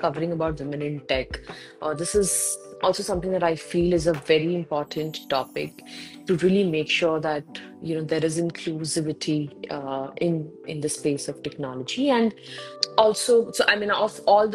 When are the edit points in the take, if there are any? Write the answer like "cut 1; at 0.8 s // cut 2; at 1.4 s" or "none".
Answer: none